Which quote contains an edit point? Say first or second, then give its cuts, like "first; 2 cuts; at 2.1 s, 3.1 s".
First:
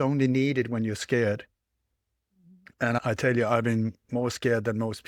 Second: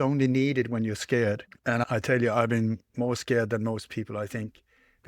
second; 1 cut; at 1.5 s